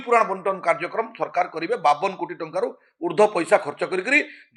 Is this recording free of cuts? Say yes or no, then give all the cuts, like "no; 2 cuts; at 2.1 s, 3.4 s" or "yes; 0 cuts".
yes; 0 cuts